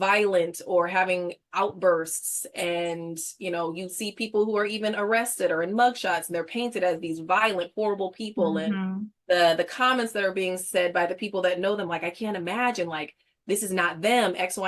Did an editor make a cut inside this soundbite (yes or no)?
no